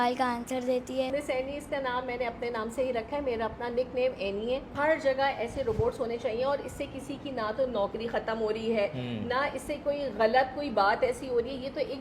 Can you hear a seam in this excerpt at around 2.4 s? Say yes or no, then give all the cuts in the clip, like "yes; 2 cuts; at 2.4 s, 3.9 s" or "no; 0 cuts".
no; 2 cuts; at 1.1 s, 4.7 s